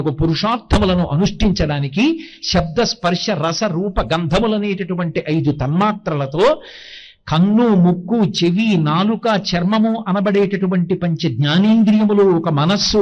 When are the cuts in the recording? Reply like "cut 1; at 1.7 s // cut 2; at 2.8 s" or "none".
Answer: none